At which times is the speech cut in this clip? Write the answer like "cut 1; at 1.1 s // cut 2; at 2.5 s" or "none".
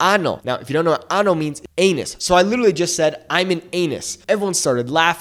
none